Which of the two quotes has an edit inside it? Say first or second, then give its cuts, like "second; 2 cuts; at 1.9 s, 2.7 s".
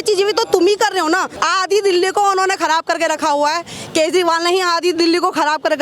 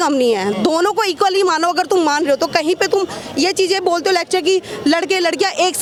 first; 1 cut; at 1.3 s